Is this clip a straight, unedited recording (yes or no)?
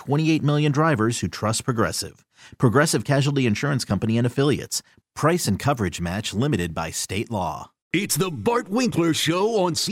no